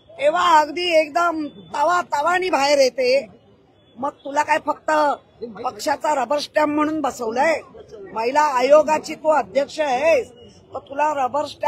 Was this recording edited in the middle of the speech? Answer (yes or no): no